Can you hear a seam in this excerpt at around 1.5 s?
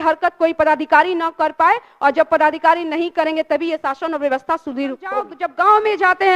no; 1 cut; at 5.4 s

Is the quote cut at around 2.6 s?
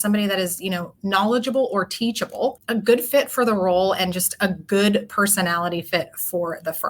yes; 1 cut; at 2.6 s

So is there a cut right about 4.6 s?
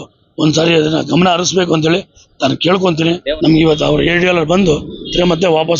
no; 1 cut; at 3.3 s

